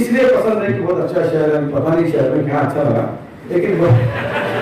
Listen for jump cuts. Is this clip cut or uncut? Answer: uncut